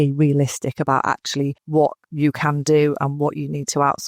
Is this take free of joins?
no; 1 cut; at 1.6 s

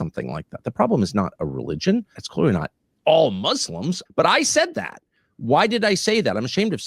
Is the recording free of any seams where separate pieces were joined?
no; 2 cuts; at 2.2 s, 4.0 s

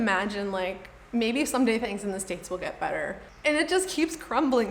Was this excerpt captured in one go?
no; 1 cut; at 3.3 s

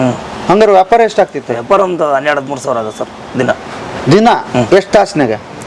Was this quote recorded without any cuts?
yes; 0 cuts

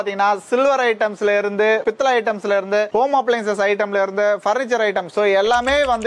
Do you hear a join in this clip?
no; 0 cuts

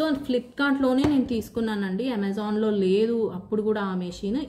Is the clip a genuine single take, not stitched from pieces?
yes; 0 cuts

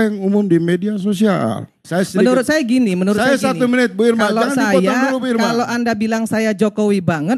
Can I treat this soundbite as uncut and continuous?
no; 1 cut; at 1.8 s

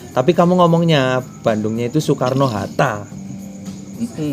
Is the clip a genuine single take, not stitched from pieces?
yes; 0 cuts

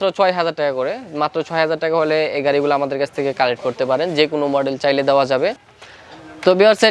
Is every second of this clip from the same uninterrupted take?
no; 1 cut; at 5.7 s

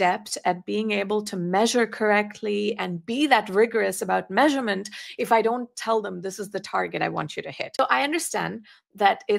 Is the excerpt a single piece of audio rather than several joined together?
no; 1 cut; at 7.8 s

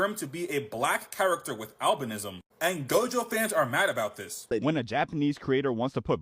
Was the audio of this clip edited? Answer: yes; 1 cut; at 4.4 s

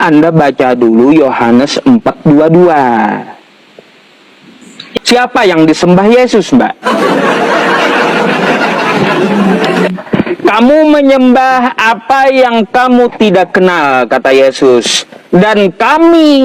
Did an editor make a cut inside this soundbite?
yes; 1 cut; at 5.0 s

